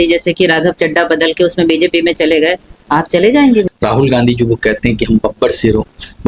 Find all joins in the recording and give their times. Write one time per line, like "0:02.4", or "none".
0:03.7